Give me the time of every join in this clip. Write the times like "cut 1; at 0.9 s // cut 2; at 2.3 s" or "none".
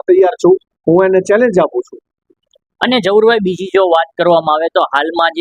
none